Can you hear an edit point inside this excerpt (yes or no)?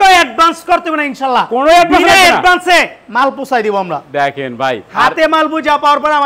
no